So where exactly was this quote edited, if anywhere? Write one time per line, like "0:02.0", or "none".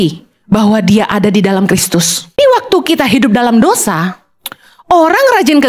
0:02.3